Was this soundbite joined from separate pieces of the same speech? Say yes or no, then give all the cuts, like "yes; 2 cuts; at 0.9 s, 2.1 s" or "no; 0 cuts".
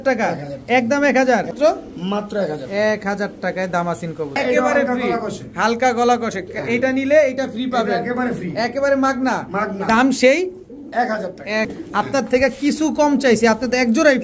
yes; 3 cuts; at 1.5 s, 4.4 s, 11.7 s